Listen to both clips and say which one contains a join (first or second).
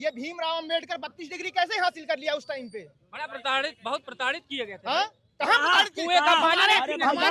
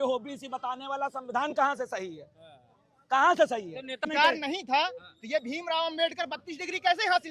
second